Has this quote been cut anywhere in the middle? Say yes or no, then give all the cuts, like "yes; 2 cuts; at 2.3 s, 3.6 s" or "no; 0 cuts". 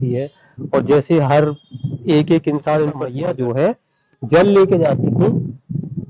yes; 1 cut; at 3.1 s